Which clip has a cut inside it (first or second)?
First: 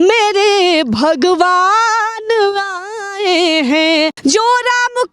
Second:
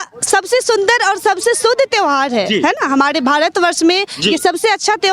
first